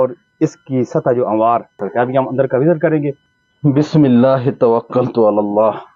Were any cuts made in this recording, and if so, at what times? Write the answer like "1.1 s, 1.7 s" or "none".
1.8 s, 3.3 s